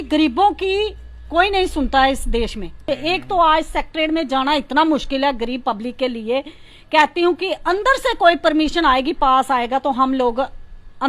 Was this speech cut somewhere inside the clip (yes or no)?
yes